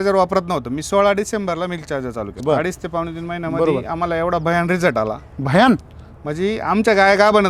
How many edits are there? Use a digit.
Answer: 1